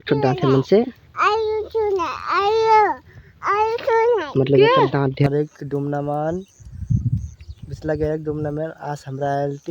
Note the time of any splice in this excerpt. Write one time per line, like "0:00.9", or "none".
0:05.3

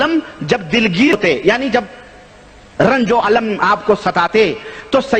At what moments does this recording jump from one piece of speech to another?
0:01.1

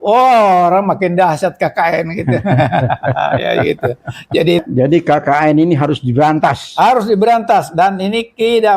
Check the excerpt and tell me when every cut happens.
0:04.6

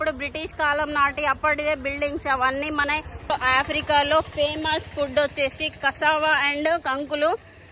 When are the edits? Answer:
0:03.3

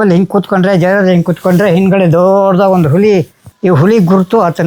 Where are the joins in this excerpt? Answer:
0:03.4

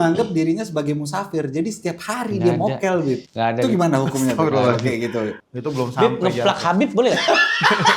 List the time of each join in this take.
0:03.3
0:05.4

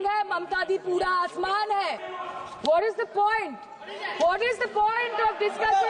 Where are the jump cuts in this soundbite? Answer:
0:02.0

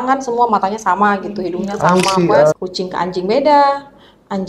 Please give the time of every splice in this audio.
0:02.5

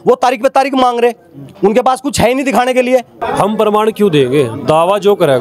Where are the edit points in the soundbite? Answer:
0:03.1

